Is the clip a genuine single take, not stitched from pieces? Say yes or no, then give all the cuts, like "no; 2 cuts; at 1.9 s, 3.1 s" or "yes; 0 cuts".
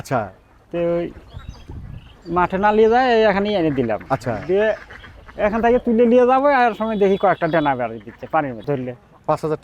no; 1 cut; at 8.6 s